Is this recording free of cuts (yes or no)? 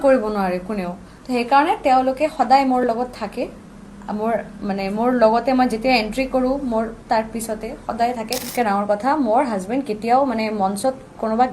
no